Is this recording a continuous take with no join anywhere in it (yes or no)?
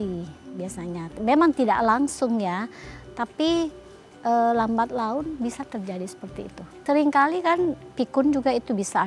no